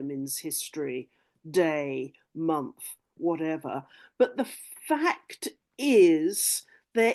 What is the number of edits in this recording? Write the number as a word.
zero